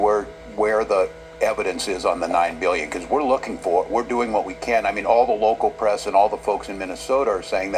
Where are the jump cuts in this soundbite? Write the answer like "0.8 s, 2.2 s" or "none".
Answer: none